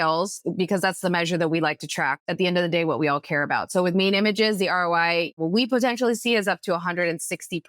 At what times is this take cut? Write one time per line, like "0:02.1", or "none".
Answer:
0:02.2
0:05.4